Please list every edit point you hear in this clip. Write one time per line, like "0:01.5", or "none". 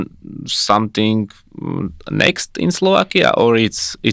none